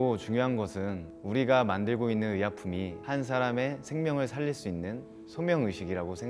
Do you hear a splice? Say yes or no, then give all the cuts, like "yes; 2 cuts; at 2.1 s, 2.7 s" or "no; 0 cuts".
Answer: no; 0 cuts